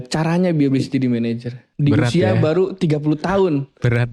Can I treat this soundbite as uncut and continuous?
no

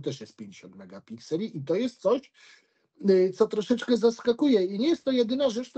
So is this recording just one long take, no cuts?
yes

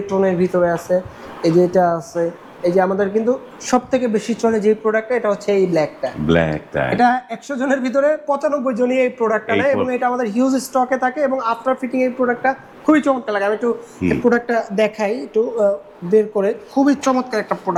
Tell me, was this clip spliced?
no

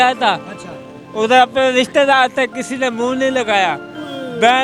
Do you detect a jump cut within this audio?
no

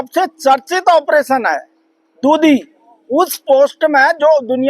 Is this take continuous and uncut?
yes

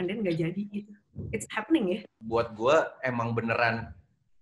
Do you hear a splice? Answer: yes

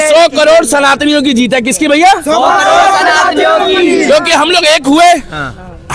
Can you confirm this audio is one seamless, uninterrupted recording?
yes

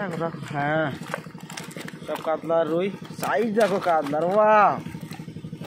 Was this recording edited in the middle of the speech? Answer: no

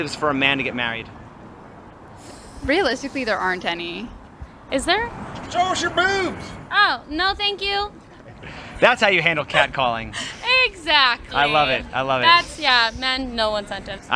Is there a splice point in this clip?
no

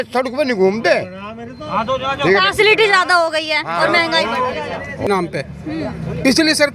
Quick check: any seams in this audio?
yes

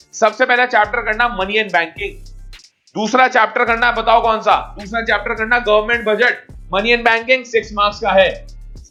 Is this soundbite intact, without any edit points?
yes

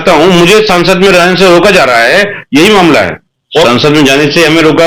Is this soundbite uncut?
no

